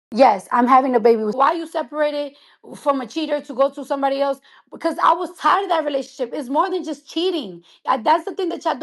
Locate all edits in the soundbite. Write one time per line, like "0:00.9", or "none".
0:01.4